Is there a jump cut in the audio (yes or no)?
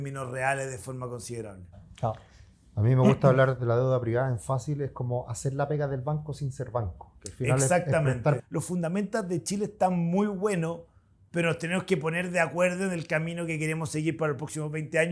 yes